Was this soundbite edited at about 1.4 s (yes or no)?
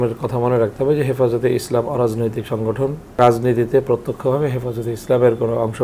no